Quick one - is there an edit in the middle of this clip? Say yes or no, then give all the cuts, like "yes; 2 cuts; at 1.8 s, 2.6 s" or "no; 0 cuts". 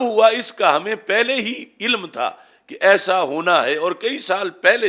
no; 0 cuts